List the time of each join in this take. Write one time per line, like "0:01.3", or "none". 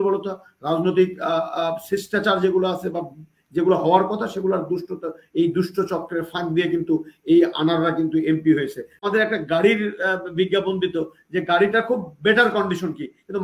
0:09.1